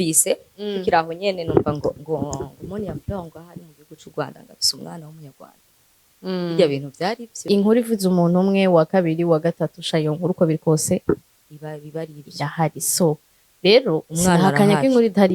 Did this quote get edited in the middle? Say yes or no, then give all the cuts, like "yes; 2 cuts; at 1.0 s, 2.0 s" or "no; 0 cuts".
yes; 1 cut; at 7.5 s